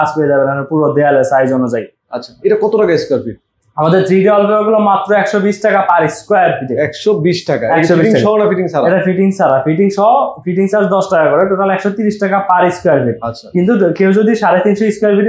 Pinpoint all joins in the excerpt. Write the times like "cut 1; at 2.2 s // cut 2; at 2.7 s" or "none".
none